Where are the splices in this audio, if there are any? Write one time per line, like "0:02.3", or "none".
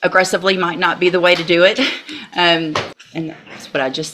0:02.9